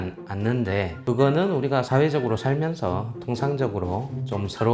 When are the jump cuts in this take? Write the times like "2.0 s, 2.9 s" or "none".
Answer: 1.0 s